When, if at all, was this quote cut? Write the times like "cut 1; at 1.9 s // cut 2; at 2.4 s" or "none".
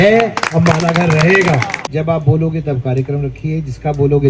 cut 1; at 1.9 s